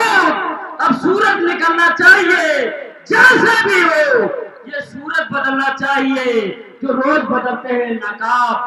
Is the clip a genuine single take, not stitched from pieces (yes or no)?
yes